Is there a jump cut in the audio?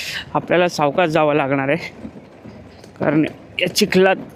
no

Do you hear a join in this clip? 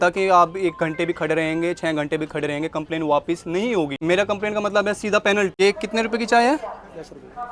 yes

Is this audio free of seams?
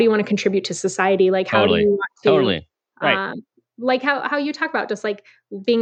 yes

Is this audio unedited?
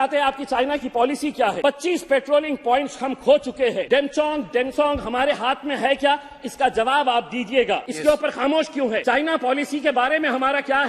no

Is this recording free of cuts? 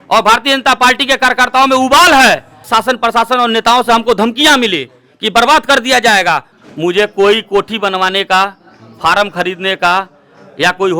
no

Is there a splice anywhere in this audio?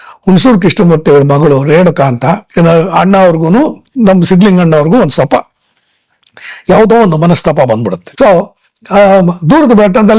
yes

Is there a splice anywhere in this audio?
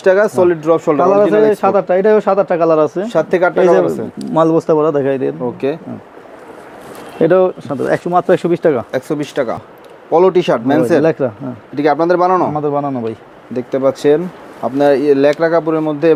no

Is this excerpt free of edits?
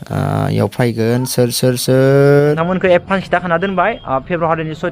no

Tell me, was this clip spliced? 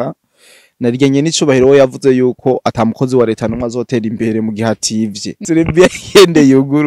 yes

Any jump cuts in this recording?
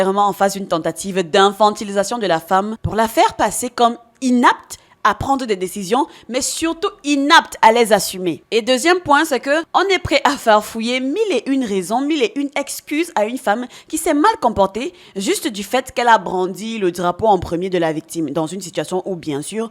yes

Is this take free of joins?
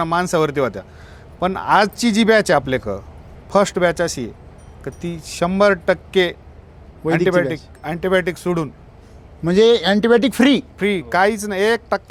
yes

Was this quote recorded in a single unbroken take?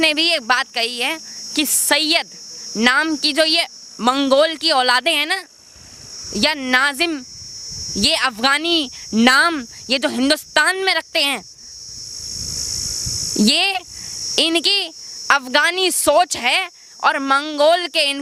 yes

